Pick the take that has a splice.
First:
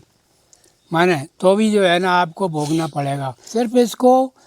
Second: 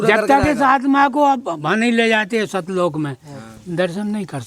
first; 1 cut; at 3.4 s

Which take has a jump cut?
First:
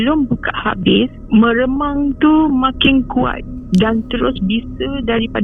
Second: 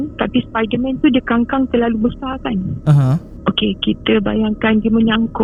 first; 1 cut; at 1.2 s

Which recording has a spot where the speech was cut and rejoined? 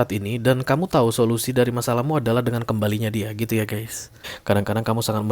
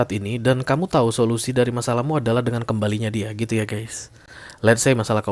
first; 1 cut; at 4.3 s

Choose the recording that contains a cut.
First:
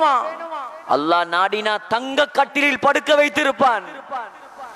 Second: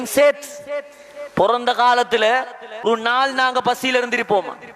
second; 1 cut; at 2.9 s

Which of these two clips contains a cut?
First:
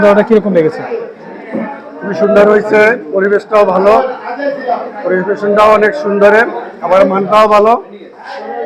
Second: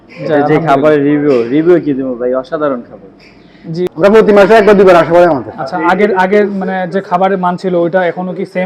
second; 1 cut; at 3.9 s

